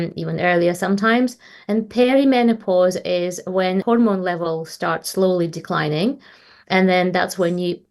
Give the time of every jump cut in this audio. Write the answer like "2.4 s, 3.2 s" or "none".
3.8 s